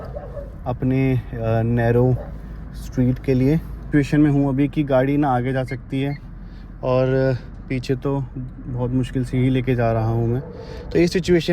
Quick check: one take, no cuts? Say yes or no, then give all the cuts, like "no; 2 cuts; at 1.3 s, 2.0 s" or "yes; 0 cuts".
no; 1 cut; at 3.8 s